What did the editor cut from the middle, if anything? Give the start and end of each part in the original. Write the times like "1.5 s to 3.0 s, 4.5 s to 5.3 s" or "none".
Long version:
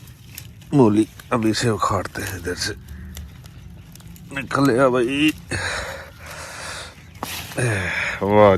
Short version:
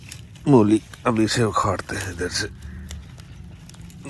none

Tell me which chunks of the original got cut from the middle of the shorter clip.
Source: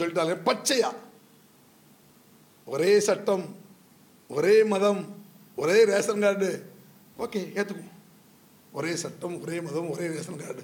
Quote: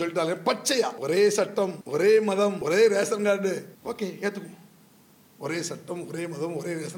1.0 s to 2.7 s, 3.5 s to 4.2 s, 5.0 s to 5.6 s, 6.7 s to 7.1 s

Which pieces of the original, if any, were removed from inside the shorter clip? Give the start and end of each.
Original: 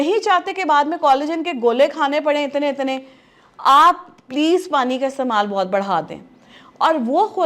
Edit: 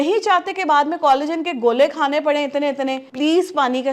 3.0 s to 4.2 s

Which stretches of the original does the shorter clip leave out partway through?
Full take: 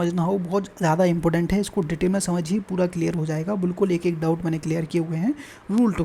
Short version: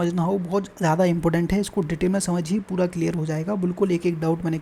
none

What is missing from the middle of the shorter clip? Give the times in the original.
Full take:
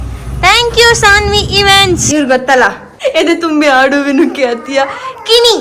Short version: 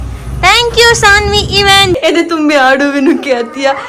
2.0 s to 3.1 s

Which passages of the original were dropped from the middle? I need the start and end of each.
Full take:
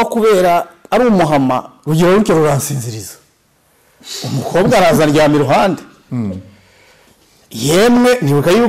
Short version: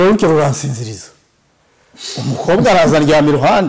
none

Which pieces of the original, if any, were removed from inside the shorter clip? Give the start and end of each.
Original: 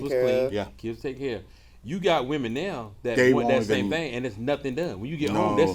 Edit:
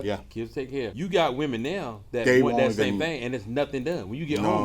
1.4 s to 1.9 s

